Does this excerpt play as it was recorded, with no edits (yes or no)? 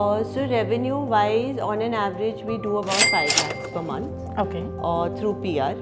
yes